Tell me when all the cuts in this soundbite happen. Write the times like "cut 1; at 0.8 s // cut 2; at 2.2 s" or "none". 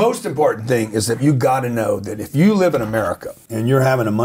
cut 1; at 1.2 s // cut 2; at 2.3 s